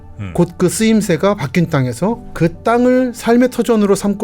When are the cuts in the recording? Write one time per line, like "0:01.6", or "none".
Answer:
0:02.3